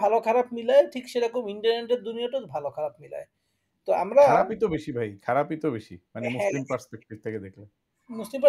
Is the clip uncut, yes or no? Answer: yes